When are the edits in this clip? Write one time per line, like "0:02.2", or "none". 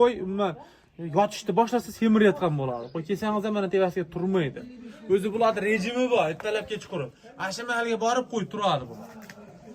none